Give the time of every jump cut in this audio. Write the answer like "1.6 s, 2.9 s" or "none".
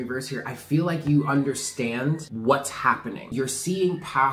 2.3 s, 3.3 s